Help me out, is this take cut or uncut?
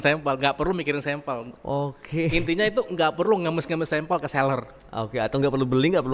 uncut